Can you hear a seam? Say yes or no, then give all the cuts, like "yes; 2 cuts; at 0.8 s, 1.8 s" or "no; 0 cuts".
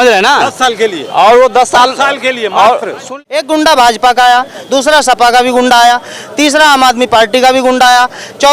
yes; 1 cut; at 3.0 s